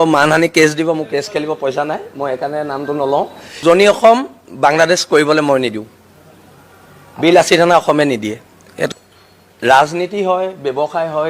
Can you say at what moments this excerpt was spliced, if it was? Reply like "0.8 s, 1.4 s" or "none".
3.4 s, 8.9 s